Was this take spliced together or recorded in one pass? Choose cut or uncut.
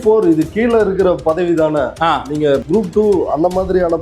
cut